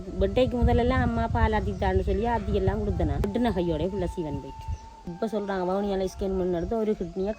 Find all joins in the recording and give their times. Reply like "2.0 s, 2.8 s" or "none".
3.3 s, 5.1 s